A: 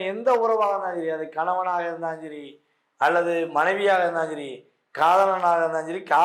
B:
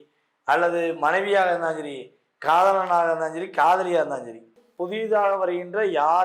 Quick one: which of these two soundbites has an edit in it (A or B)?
B